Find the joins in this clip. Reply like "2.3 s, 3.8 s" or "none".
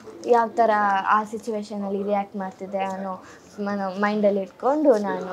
none